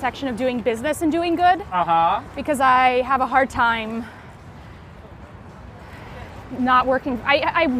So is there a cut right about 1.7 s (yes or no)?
no